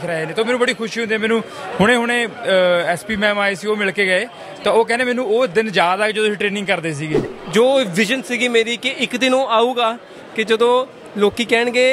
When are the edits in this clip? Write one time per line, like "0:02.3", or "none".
0:07.3